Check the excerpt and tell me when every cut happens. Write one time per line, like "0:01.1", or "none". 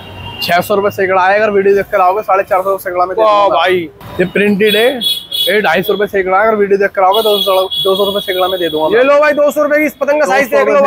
0:03.9